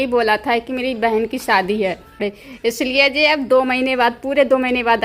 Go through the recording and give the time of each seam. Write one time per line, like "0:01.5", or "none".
0:02.3